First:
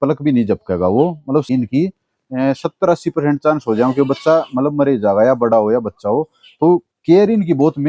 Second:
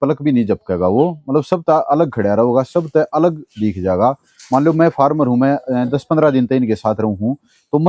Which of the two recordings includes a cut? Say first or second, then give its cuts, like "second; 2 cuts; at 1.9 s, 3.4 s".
first; 1 cut; at 1.5 s